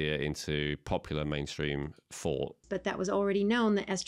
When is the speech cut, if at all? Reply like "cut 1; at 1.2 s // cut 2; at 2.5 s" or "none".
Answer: cut 1; at 2.7 s